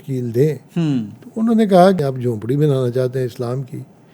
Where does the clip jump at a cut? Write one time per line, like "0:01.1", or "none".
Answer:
0:02.0